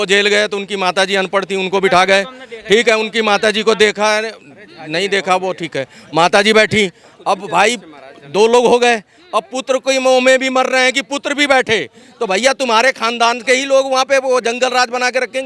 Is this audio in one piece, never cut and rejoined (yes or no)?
yes